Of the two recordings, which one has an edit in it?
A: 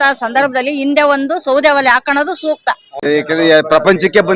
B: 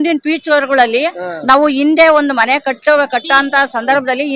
A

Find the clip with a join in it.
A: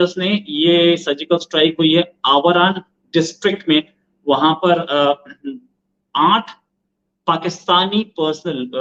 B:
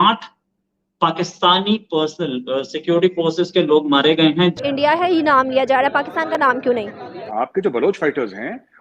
B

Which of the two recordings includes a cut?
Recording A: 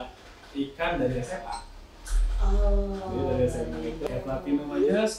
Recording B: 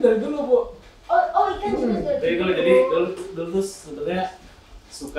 A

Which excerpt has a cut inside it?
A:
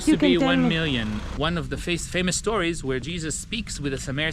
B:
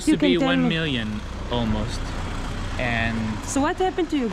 A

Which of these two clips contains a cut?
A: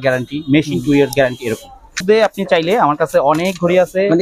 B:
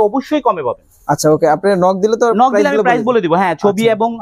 A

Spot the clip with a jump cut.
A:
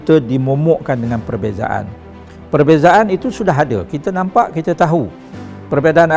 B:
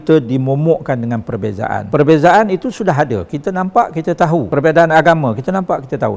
B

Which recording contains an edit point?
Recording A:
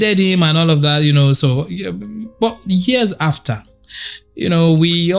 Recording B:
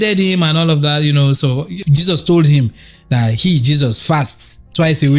B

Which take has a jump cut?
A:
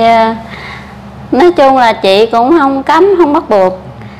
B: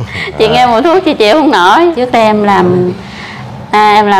B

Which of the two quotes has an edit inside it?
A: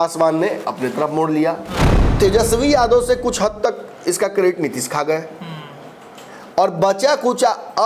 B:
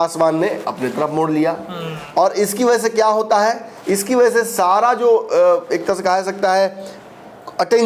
A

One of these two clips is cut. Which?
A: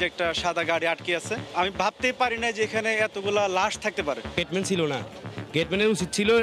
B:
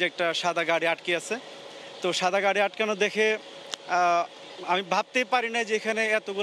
A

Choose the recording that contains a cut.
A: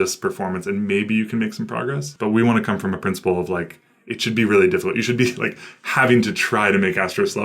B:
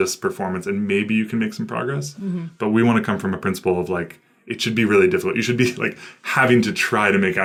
A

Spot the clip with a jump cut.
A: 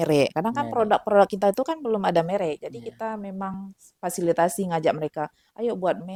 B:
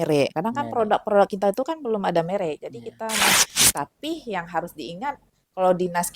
B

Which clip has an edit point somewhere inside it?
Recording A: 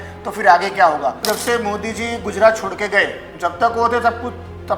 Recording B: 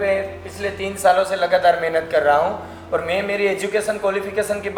A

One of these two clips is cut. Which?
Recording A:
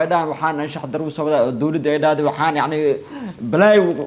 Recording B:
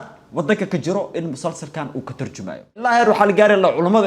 B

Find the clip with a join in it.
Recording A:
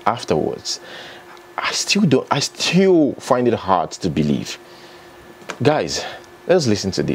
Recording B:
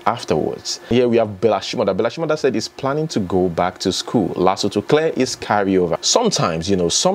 B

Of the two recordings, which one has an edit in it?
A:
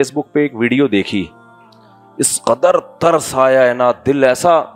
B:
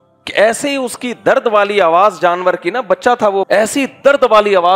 B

